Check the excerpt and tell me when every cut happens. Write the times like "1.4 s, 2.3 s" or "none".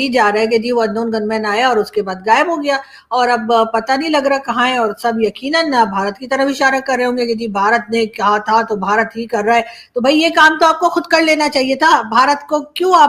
none